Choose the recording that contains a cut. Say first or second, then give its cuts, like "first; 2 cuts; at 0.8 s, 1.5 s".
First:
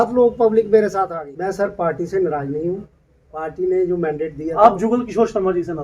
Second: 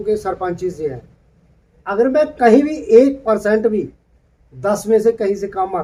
first; 1 cut; at 1.2 s